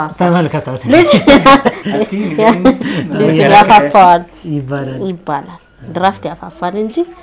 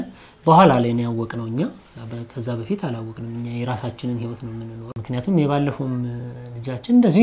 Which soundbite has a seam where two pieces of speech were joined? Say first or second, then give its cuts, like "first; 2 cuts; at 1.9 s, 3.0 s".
second; 1 cut; at 5.0 s